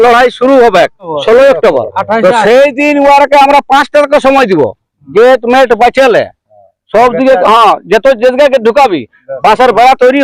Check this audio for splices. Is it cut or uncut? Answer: uncut